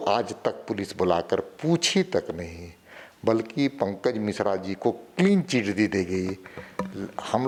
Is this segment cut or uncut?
uncut